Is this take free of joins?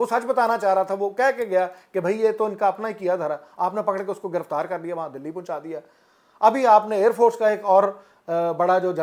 yes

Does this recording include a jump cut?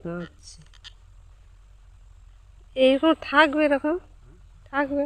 no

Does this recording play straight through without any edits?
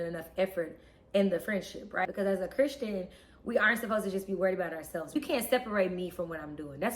no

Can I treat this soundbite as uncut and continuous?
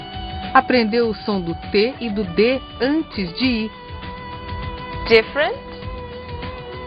no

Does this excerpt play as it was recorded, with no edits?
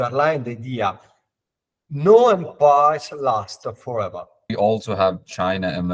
no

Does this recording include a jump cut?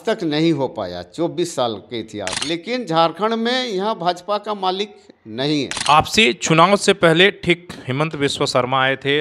yes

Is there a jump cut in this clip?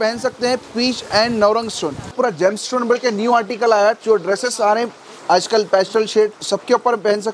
yes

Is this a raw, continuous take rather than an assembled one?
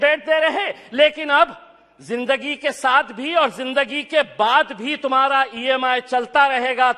yes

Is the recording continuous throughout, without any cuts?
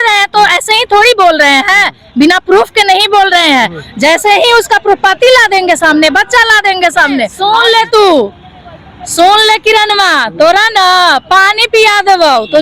no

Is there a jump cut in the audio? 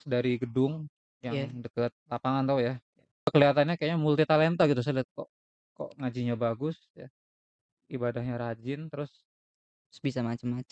yes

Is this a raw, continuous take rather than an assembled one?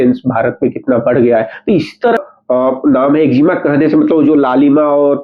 no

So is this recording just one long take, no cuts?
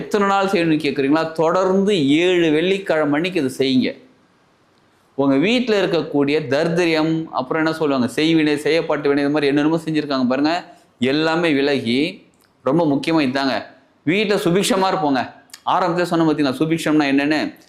yes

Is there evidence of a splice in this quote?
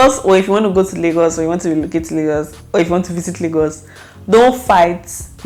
no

